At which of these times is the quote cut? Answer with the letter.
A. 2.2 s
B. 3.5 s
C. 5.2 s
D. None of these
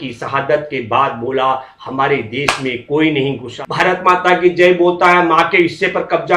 B